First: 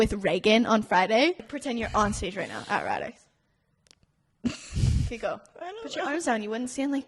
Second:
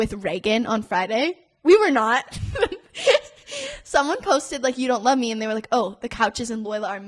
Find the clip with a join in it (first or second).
first